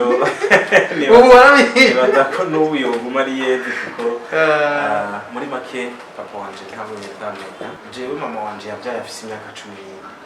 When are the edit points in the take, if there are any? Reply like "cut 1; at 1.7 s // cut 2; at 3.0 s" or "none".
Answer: cut 1; at 7.8 s